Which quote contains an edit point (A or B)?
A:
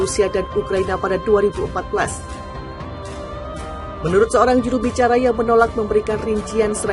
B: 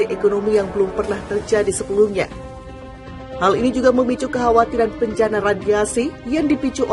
A